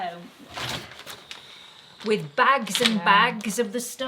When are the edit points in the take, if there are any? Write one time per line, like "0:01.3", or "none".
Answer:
none